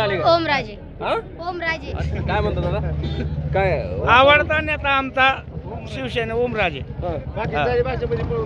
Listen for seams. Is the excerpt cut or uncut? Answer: cut